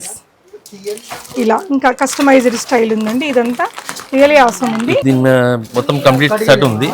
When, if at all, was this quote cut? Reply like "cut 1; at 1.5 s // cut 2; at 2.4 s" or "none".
cut 1; at 5.0 s